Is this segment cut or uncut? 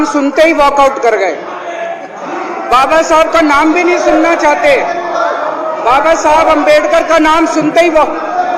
uncut